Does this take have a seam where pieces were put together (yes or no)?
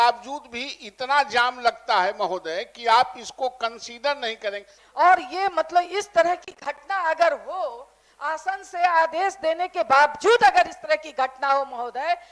yes